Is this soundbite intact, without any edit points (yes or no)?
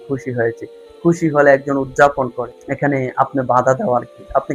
no